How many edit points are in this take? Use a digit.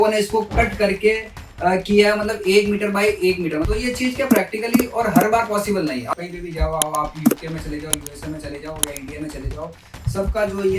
2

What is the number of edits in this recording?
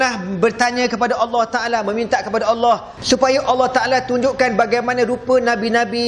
1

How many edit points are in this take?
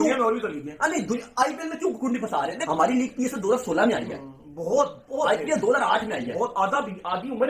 0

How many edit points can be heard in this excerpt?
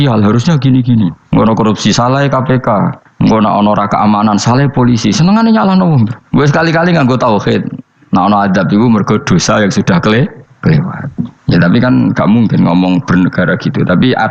2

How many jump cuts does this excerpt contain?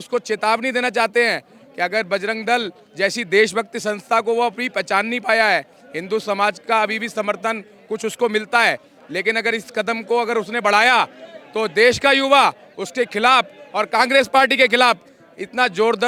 0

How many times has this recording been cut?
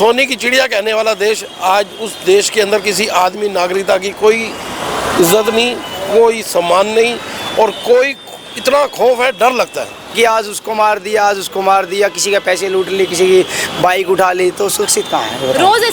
1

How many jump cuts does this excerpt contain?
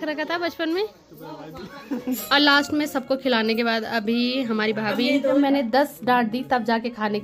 2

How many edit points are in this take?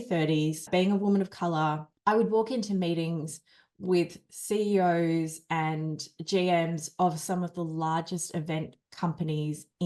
1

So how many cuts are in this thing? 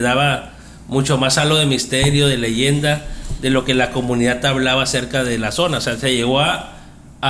0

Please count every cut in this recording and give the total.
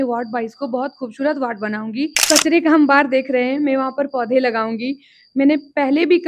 1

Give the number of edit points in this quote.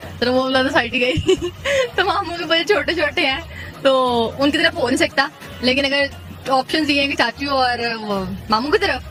0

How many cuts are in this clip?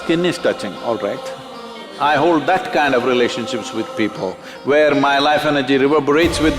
1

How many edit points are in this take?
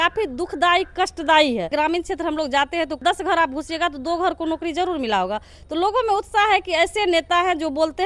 2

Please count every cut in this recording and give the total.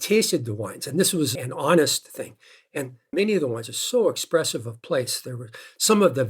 0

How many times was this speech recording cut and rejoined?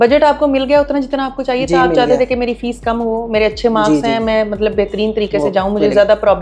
0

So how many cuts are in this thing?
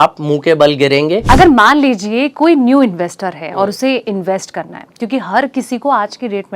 1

